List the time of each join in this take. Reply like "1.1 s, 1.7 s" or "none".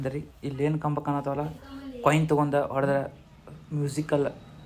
none